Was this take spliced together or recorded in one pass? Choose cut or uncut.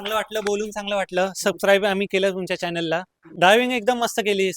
cut